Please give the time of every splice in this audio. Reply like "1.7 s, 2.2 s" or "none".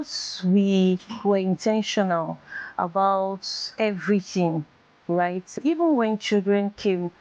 5.6 s